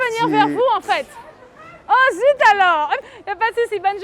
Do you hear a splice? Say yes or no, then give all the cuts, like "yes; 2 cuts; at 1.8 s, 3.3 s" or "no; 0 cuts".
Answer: no; 0 cuts